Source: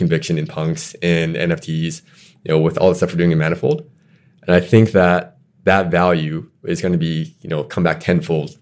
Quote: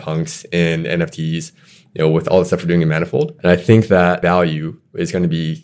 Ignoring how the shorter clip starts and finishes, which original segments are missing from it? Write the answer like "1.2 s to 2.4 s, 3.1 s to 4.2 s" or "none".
3.8 s to 4.4 s, 5.2 s to 5.9 s